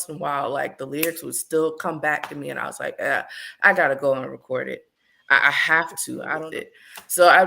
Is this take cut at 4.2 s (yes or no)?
no